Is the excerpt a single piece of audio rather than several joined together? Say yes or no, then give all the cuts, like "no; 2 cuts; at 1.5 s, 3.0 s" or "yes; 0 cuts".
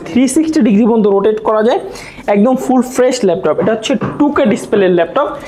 yes; 0 cuts